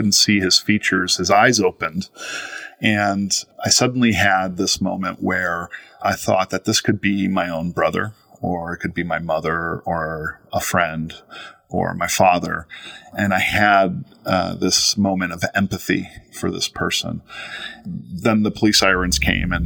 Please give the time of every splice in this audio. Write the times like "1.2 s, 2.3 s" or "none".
3.4 s, 6.0 s, 13.1 s, 17.7 s